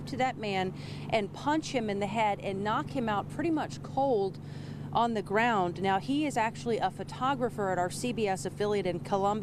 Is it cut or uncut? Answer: uncut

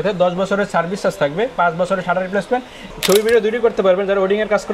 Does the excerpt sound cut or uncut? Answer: cut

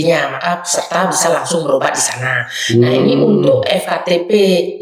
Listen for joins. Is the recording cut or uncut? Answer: uncut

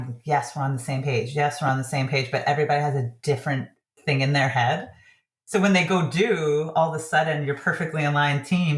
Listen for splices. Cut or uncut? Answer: uncut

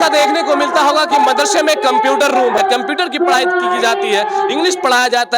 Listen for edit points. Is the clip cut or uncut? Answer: cut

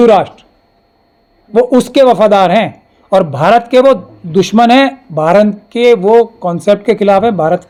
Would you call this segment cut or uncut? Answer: uncut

